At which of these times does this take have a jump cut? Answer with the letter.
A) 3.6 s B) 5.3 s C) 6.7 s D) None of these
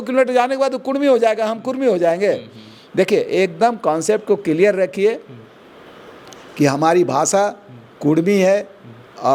D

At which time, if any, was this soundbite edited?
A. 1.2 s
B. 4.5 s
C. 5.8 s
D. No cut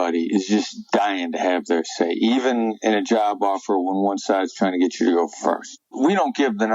C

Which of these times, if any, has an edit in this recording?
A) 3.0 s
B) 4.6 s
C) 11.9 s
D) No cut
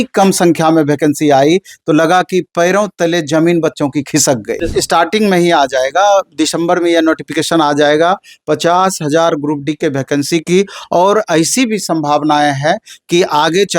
B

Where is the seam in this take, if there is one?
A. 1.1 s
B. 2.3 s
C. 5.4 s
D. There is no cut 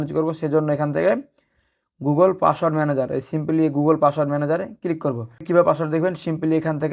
C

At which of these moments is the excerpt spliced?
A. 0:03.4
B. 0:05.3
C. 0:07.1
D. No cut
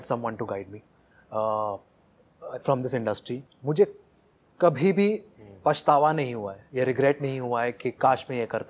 A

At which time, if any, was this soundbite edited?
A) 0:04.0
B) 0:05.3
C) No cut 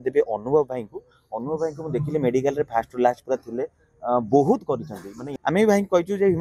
B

